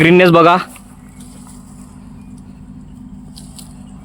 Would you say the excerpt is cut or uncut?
uncut